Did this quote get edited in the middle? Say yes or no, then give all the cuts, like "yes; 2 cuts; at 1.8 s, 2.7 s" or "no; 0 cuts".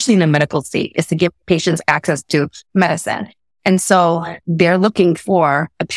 yes; 2 cuts; at 1.4 s, 4.4 s